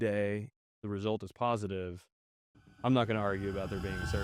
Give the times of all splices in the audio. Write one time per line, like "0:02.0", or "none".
none